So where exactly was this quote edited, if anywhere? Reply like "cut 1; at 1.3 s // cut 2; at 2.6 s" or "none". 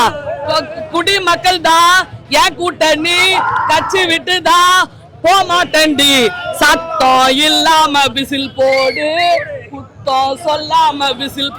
none

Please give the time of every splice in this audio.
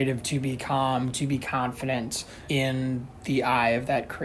none

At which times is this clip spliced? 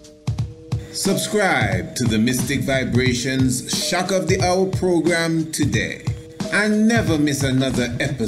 cut 1; at 1.0 s

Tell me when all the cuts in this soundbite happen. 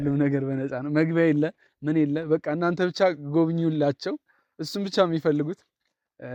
none

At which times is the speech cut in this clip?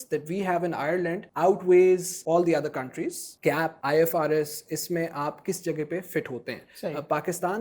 cut 1; at 1.3 s // cut 2; at 2.1 s // cut 3; at 3.5 s

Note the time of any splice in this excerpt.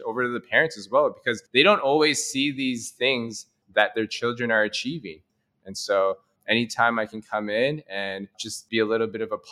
cut 1; at 5.2 s

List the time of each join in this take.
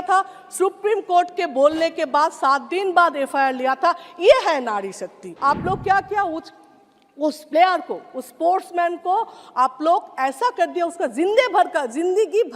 cut 1; at 5.3 s

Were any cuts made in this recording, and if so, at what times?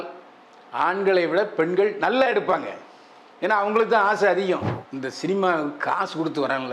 cut 1; at 4.8 s

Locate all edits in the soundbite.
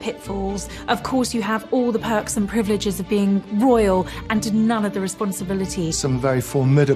cut 1; at 6.0 s

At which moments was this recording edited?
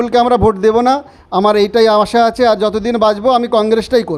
none

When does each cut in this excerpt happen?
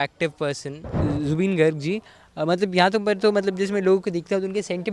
cut 1; at 1.0 s

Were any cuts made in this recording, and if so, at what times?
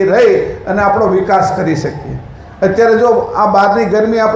none

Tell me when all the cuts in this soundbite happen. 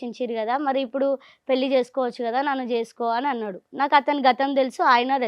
none

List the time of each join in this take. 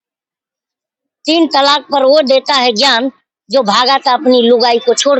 none

